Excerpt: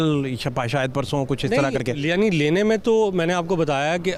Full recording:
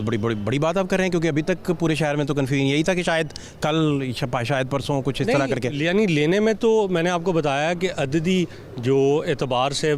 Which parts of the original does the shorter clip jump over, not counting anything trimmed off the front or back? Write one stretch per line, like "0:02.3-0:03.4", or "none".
none